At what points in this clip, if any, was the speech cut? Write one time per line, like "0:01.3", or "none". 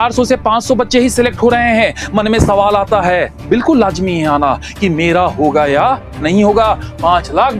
none